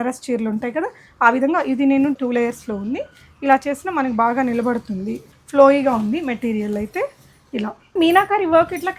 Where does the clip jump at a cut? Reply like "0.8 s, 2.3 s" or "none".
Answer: 2.2 s, 5.3 s, 7.9 s

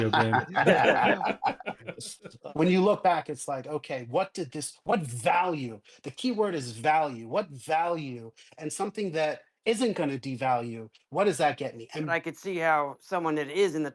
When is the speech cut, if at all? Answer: 2.3 s, 12.1 s

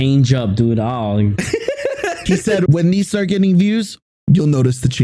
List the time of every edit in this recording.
2.7 s

